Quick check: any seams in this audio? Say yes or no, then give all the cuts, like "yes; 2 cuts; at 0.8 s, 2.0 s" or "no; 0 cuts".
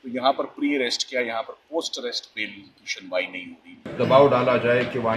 yes; 1 cut; at 3.9 s